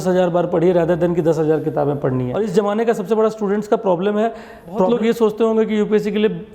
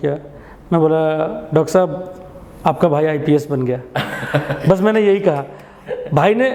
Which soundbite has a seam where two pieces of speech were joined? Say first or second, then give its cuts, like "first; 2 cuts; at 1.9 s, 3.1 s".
first; 2 cuts; at 2.4 s, 4.9 s